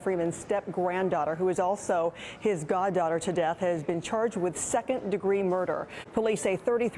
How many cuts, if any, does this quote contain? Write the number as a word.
one